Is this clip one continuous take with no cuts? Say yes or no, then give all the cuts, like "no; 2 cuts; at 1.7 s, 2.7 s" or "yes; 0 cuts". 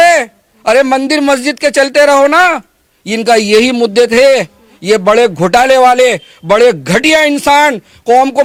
yes; 0 cuts